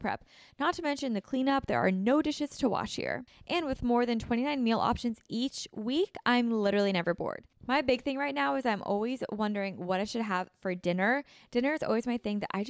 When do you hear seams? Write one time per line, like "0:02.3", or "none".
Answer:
0:03.2
0:07.5